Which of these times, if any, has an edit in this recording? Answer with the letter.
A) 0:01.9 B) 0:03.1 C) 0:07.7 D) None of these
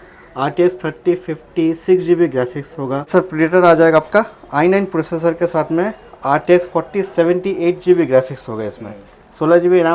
B